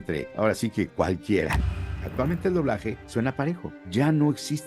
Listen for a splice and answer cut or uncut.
cut